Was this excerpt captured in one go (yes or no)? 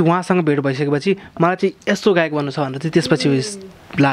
yes